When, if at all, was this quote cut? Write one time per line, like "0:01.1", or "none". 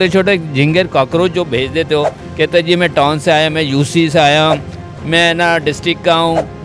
none